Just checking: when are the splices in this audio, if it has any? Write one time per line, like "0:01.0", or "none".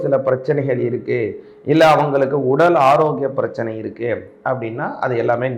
none